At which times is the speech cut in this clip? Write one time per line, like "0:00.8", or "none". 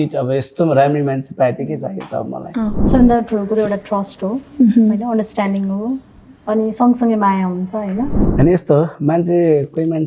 0:02.8
0:08.2